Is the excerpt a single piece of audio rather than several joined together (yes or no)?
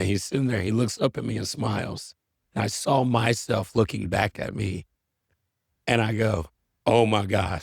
yes